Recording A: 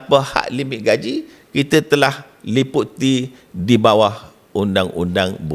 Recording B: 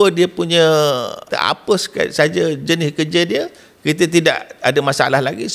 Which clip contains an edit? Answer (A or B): B